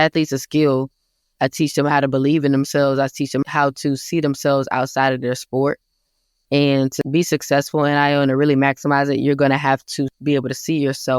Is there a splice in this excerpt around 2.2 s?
no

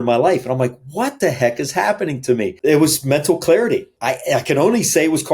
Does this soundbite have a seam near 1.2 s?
no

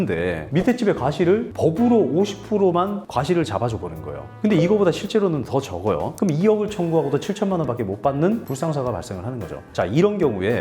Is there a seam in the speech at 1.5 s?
yes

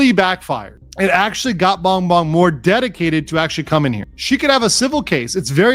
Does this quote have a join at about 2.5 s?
no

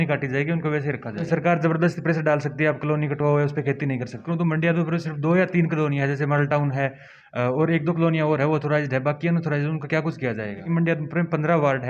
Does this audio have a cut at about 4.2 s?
yes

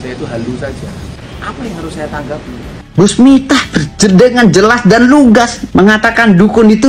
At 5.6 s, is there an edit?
yes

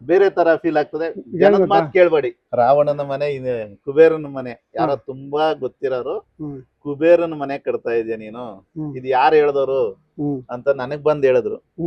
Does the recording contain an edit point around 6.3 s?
no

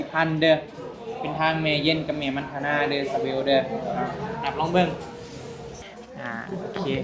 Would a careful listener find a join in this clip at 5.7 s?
yes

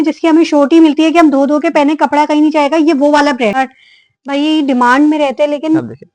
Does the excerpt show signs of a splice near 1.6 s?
no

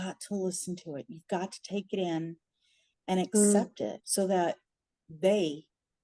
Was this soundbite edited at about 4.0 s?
yes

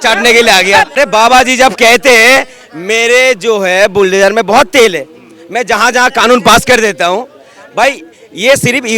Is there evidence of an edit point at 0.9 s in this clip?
yes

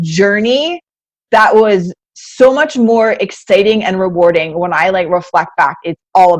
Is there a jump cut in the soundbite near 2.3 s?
no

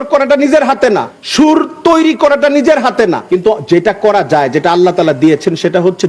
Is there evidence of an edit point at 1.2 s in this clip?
yes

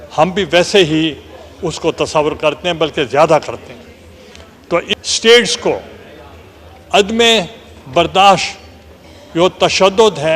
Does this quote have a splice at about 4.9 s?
yes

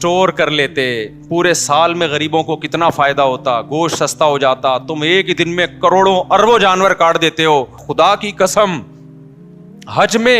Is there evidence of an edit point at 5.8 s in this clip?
no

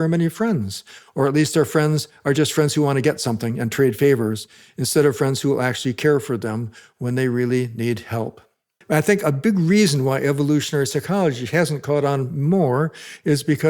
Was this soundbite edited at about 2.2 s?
no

